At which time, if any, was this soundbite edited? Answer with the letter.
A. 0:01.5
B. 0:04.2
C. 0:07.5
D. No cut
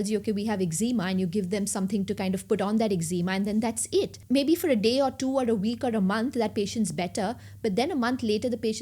B